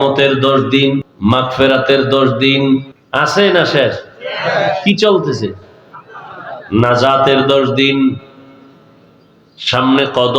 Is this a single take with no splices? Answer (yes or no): no